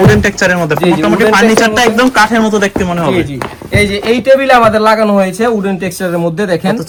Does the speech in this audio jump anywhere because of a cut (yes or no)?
no